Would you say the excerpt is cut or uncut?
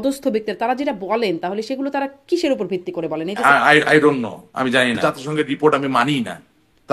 cut